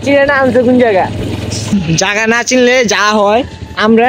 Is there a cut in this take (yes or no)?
yes